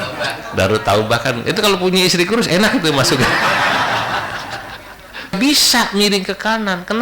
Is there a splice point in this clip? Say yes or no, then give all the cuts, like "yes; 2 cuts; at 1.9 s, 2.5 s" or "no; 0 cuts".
yes; 1 cut; at 5.4 s